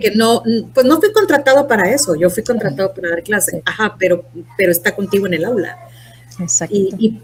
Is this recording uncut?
yes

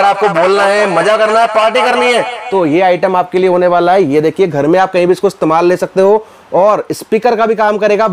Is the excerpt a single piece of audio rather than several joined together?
yes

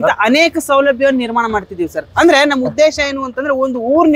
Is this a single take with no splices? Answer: yes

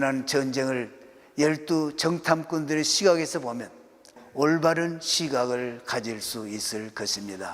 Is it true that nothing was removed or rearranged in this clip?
no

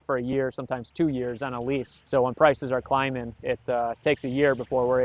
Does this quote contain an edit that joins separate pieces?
yes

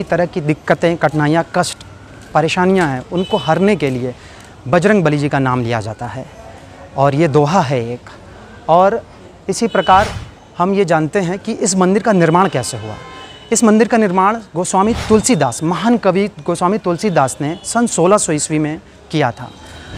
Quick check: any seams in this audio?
no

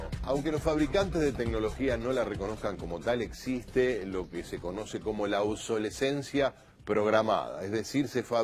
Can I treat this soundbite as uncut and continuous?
no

